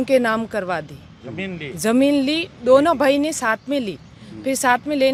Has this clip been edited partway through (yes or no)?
no